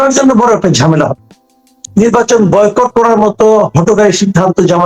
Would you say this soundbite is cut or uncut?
cut